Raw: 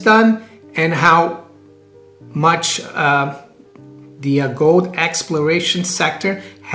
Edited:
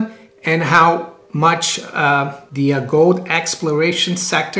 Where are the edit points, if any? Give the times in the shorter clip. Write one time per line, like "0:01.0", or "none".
0:01.2
0:02.4